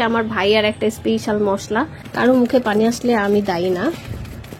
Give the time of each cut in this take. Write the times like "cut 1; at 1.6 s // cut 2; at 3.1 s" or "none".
cut 1; at 2.0 s